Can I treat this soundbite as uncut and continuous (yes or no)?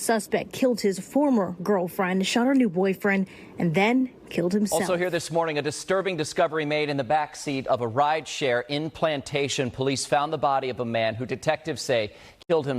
no